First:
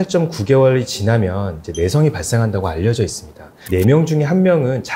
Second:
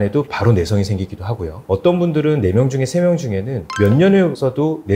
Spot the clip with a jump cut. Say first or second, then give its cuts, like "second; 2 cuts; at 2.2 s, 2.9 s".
first; 1 cut; at 3.6 s